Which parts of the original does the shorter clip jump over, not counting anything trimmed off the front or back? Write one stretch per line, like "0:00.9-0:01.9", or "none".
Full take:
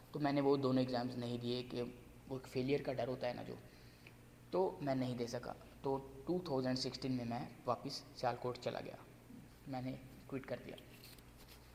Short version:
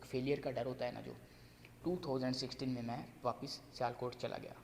0:04.1-0:06.1

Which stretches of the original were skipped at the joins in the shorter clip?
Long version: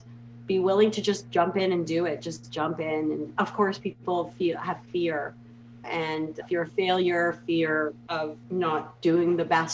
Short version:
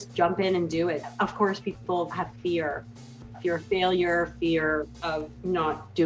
0:02.2-0:03.3
0:04.3-0:04.6
0:05.8-0:06.4

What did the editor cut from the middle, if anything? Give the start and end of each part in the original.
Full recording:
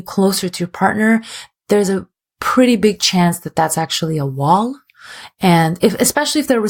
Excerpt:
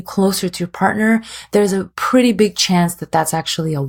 0:01.6-0:02.0

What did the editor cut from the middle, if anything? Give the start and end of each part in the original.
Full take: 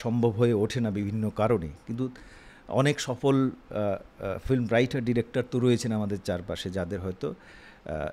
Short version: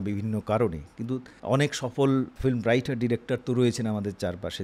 0:02.2-0:02.6
0:03.6-0:04.4

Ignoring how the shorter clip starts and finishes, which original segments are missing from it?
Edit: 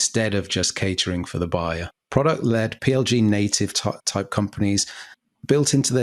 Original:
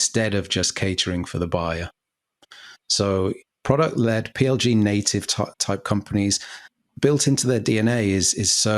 0:02.0-0:03.5

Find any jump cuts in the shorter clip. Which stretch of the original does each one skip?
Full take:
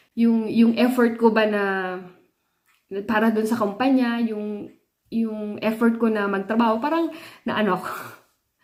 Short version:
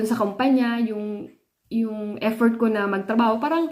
none

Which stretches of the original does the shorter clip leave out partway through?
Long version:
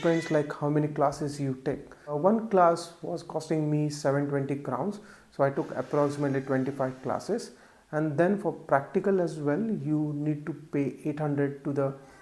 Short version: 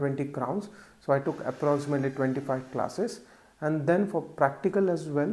none

